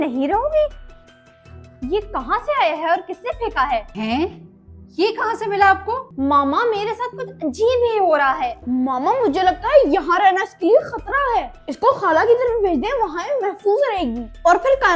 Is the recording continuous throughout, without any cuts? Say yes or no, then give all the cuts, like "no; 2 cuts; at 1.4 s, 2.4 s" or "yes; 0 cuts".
no; 3 cuts; at 3.9 s, 6.1 s, 8.5 s